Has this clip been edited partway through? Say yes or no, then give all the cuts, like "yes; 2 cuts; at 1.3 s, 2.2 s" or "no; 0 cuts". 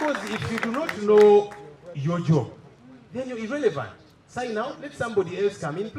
no; 0 cuts